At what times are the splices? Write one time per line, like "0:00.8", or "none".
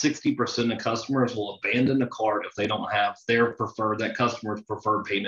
none